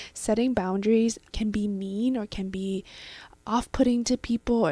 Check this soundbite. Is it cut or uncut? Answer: cut